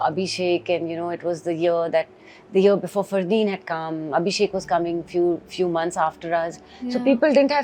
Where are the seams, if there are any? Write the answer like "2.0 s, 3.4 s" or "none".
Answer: none